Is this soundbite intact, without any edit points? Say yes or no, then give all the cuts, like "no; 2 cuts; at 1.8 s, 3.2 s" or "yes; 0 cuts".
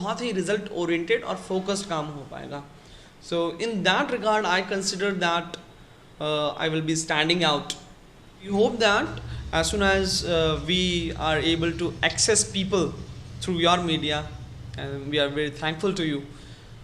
no; 1 cut; at 8.5 s